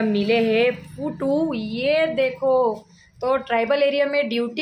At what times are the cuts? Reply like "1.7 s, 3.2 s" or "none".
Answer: none